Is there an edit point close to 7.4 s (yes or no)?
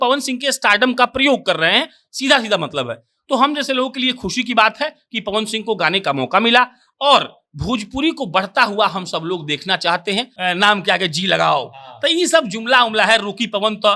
no